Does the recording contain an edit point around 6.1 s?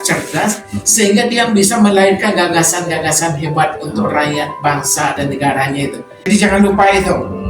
yes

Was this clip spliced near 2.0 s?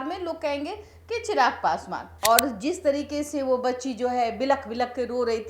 yes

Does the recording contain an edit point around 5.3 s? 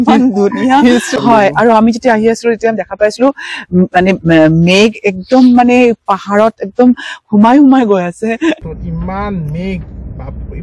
no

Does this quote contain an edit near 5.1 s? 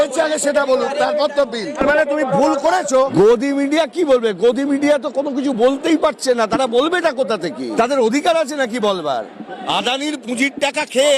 no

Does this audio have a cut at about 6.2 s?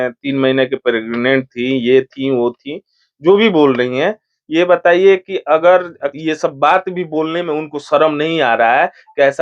yes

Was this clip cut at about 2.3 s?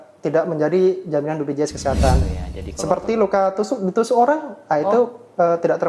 yes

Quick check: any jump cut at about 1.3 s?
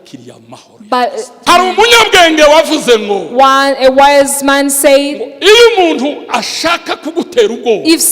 yes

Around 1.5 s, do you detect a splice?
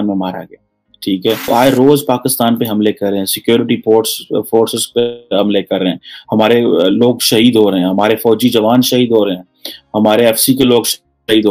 yes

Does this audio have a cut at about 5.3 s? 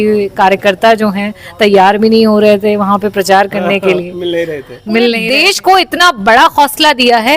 yes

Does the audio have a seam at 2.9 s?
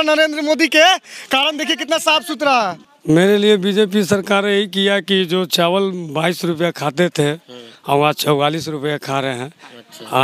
yes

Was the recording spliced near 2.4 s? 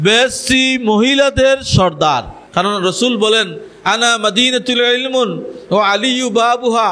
yes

